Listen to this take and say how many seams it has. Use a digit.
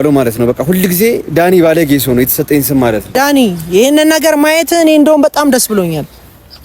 1